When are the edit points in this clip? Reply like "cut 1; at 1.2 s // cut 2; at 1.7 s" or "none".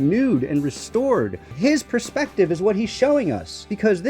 cut 1; at 1.5 s